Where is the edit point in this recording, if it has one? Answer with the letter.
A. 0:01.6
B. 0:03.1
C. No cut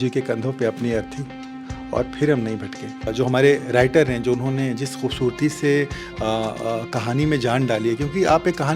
B